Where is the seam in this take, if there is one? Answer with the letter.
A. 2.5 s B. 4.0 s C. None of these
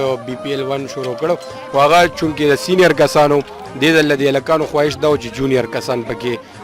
C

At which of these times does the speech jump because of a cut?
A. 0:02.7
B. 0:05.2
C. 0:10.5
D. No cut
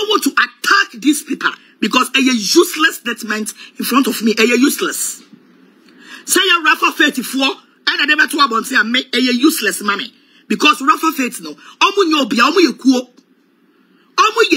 D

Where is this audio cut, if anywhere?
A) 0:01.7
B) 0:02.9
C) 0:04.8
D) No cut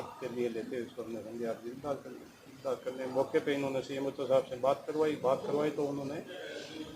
D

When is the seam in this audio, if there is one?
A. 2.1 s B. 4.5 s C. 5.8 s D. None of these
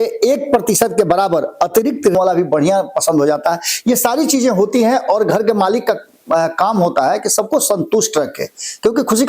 A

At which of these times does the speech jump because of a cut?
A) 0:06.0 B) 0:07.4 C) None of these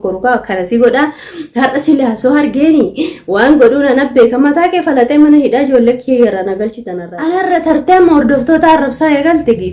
B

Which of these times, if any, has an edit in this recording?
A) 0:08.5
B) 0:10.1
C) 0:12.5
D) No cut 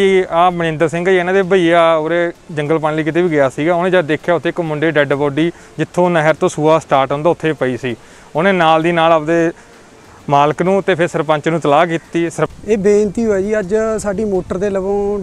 C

